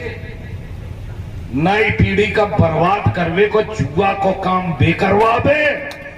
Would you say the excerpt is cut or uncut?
uncut